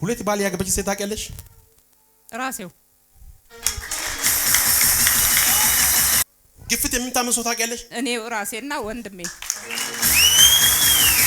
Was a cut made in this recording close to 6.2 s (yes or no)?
yes